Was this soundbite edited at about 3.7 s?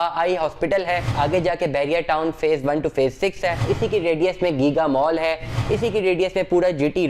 yes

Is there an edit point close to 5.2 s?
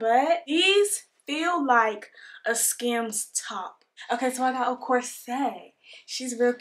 no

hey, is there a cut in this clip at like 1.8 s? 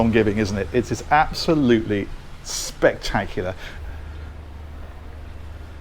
no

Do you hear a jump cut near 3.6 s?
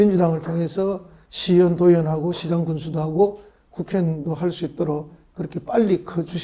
no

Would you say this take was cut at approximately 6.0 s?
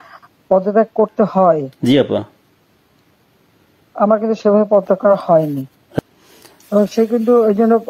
yes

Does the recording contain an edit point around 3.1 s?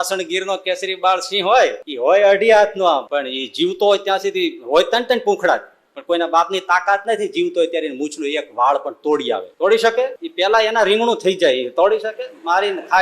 yes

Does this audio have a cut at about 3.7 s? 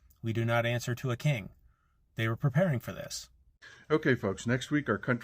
yes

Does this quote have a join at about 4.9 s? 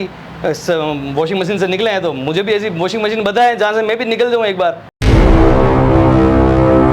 yes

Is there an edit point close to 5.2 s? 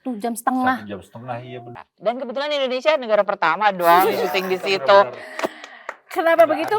no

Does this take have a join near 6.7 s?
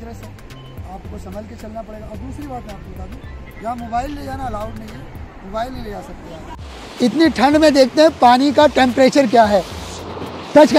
yes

